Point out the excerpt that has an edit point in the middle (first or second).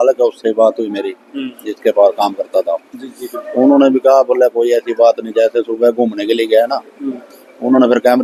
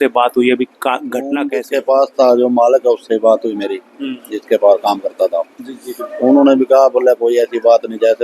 second